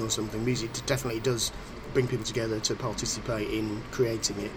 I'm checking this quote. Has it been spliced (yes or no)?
no